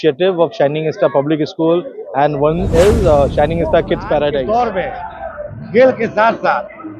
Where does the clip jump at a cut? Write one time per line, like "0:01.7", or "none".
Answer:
0:04.4